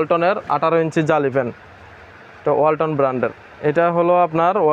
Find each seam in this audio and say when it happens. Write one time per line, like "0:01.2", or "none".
0:03.4